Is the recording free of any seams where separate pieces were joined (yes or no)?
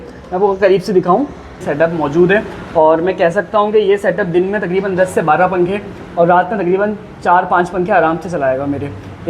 no